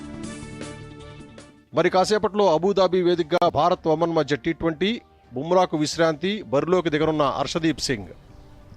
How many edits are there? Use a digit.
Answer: 1